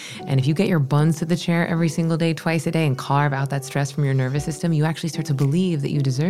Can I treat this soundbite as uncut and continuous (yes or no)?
no